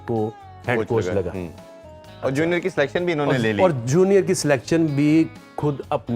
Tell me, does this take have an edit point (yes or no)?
no